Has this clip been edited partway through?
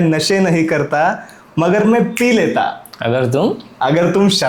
no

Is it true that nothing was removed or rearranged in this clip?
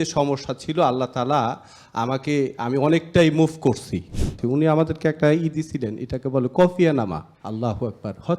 no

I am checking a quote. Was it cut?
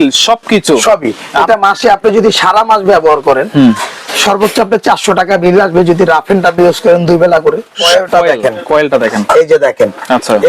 yes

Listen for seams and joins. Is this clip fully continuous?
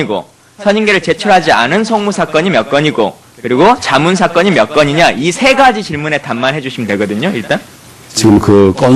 no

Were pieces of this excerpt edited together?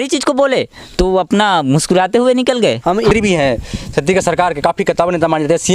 yes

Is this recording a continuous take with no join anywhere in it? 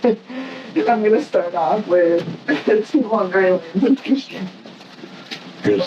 yes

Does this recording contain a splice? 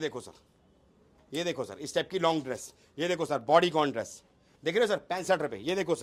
no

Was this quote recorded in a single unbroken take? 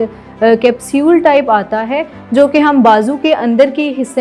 yes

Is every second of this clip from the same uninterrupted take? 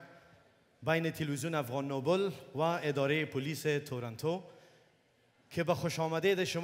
yes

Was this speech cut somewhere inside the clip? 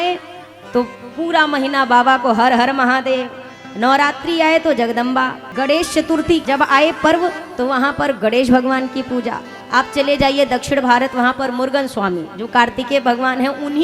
yes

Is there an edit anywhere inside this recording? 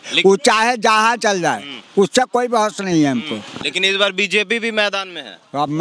yes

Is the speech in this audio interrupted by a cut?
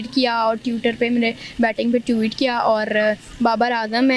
no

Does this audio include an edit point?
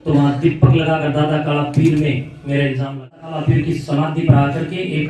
yes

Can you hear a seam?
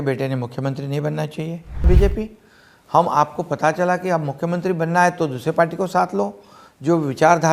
yes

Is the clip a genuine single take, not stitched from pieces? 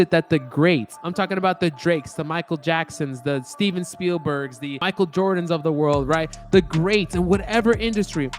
no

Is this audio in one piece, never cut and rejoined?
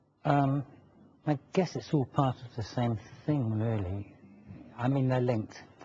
no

